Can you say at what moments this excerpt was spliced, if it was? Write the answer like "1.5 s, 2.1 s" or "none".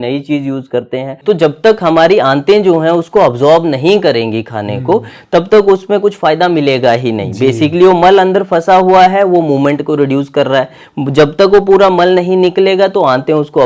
1.2 s